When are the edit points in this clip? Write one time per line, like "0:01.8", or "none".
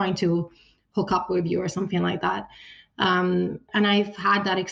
0:03.6